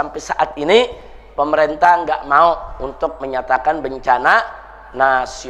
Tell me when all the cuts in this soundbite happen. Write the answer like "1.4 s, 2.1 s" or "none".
none